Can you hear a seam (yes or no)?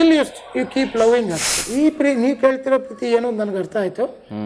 yes